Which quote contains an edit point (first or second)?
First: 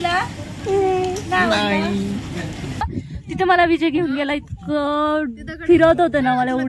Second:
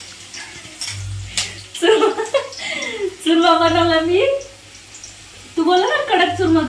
first